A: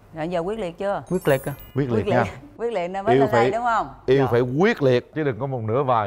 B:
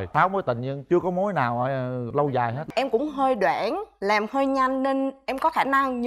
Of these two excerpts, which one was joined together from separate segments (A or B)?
B